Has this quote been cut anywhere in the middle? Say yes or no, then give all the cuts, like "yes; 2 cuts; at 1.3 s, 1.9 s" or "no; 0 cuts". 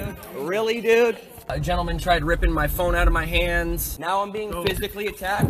yes; 2 cuts; at 1.5 s, 3.9 s